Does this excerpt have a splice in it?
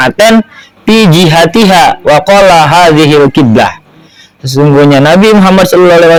no; 0 cuts

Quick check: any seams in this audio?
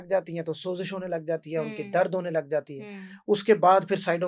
no; 0 cuts

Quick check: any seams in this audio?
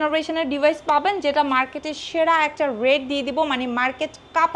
no; 0 cuts

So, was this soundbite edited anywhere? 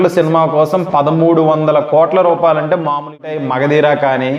yes; 1 cut; at 3.3 s

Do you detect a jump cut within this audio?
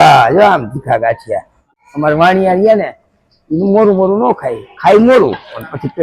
yes; 1 cut; at 1.7 s

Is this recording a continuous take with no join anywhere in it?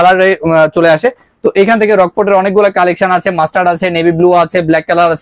yes; 0 cuts

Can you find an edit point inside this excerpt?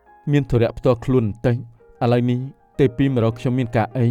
no; 0 cuts

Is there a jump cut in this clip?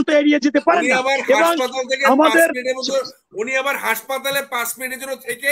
no; 0 cuts

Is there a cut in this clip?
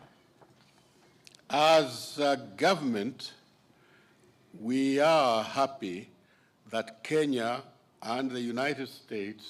no; 0 cuts

